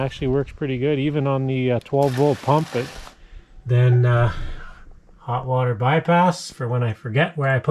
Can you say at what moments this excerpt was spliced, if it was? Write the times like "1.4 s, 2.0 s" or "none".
3.8 s